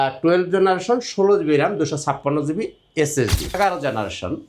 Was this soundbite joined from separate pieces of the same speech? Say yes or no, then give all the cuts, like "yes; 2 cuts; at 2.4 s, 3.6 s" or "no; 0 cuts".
yes; 1 cut; at 3.6 s